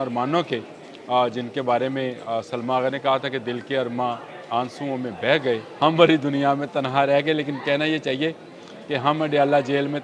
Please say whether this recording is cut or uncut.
cut